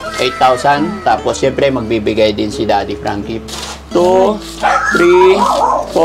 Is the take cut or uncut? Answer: cut